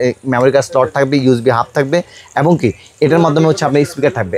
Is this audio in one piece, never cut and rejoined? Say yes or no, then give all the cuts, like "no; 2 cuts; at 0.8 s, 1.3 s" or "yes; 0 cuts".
yes; 0 cuts